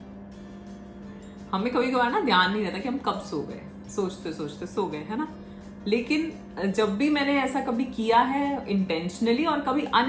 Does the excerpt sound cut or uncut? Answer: uncut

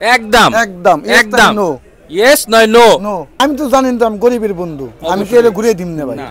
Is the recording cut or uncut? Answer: cut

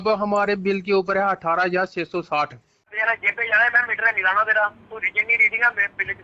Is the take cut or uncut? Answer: cut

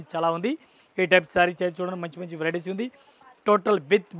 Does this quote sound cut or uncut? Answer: uncut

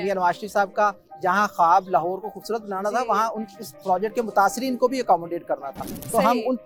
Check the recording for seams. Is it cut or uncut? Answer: uncut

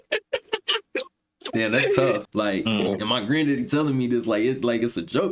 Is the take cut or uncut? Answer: cut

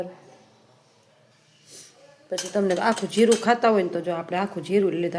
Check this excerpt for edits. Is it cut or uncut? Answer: uncut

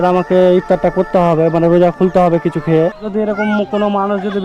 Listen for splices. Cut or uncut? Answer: cut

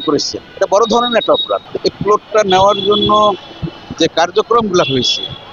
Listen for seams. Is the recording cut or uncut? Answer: cut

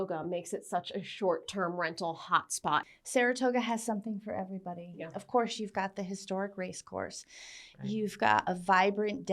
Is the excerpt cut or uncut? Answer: cut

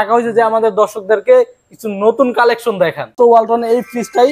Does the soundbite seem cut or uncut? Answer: cut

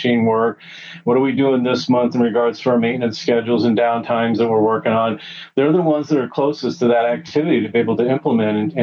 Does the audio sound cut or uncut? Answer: uncut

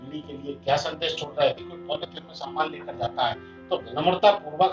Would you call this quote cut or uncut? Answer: cut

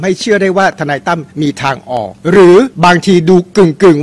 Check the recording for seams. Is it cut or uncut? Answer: cut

